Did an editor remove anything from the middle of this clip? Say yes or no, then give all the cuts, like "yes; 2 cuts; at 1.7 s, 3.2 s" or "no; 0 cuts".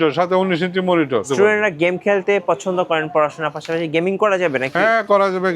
yes; 1 cut; at 1.3 s